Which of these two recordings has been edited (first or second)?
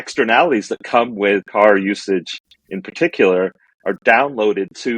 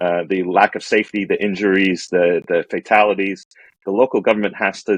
first